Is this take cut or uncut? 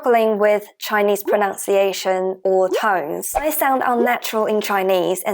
cut